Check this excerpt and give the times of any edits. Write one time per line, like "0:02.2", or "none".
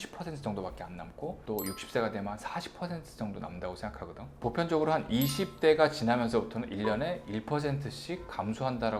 none